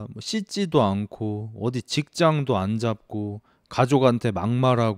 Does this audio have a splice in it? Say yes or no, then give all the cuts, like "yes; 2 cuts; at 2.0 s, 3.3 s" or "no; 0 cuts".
no; 0 cuts